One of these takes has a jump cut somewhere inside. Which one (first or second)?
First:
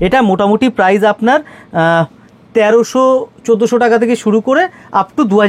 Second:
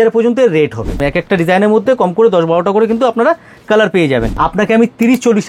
second